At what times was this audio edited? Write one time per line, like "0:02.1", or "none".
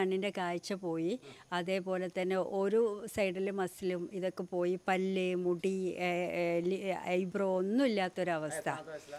none